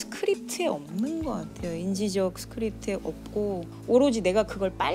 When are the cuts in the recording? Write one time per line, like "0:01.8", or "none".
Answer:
none